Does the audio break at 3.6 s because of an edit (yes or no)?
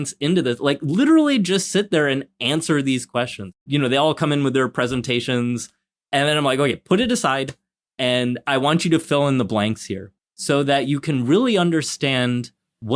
yes